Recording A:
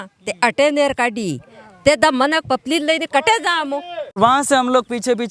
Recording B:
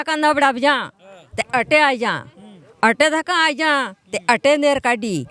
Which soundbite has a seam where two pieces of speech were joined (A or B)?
A